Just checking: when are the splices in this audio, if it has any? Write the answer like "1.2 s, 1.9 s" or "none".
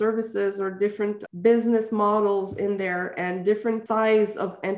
3.8 s